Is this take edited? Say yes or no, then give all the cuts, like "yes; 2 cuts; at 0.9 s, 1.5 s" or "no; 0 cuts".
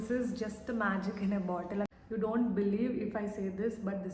yes; 1 cut; at 1.9 s